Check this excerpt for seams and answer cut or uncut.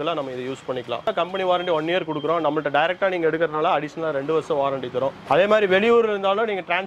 cut